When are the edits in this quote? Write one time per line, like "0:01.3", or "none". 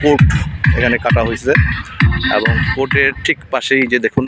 none